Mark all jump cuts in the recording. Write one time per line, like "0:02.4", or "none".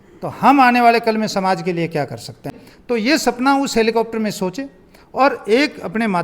0:02.5